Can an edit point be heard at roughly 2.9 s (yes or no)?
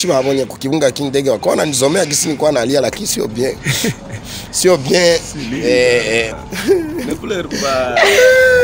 no